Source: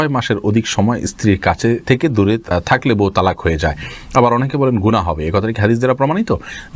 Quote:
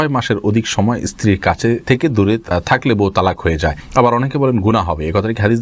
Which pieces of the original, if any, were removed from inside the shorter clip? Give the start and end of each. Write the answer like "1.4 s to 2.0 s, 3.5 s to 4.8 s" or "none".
3.8 s to 4.0 s